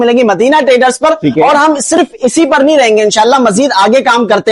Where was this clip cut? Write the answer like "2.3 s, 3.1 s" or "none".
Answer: none